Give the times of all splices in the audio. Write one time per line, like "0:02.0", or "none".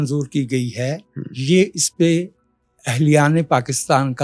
none